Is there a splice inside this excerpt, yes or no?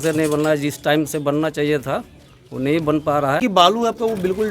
yes